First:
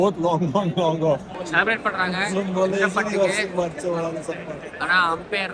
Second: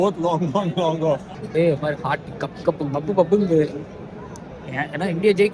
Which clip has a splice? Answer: second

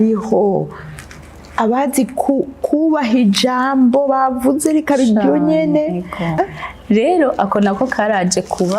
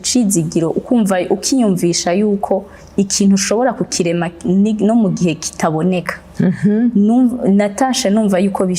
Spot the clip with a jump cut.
first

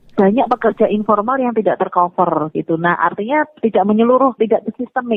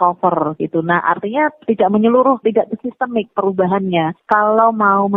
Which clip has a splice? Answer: second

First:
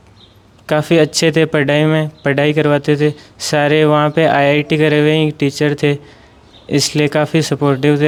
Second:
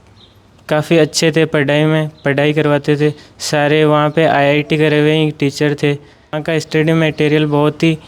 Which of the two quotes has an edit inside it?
second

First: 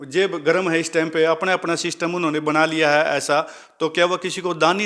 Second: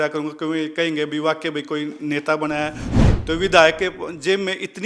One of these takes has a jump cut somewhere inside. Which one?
second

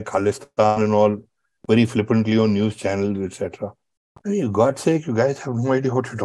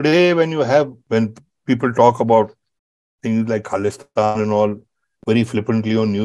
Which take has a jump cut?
second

